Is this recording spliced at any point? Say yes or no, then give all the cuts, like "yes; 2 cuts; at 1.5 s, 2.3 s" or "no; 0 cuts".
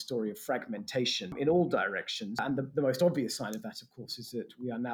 yes; 2 cuts; at 1.3 s, 2.4 s